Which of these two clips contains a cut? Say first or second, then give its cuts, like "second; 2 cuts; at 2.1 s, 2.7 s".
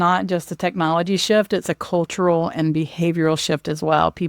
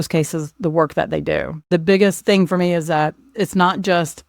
second; 3 cuts; at 1.5 s, 2.2 s, 3.3 s